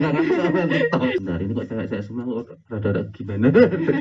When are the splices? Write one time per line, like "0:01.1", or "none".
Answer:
0:01.2